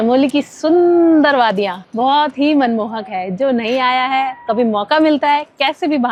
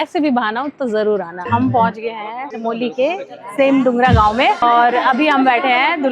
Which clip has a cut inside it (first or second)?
second